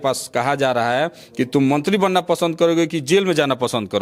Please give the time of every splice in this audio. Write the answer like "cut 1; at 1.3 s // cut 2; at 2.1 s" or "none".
none